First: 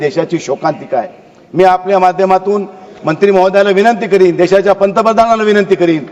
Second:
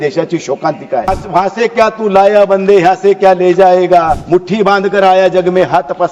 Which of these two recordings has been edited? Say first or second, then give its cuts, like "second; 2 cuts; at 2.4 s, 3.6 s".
second; 2 cuts; at 1.1 s, 4.2 s